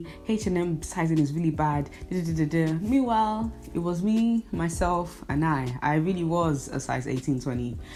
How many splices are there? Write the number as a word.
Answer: zero